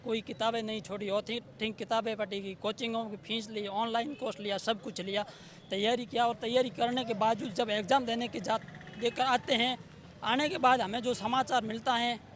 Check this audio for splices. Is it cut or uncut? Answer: uncut